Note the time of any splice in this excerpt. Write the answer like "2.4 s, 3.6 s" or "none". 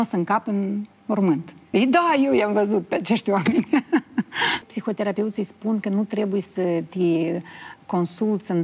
1.5 s, 4.7 s